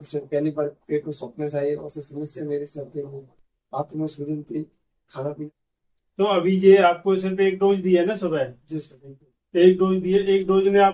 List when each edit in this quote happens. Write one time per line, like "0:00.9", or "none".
0:05.4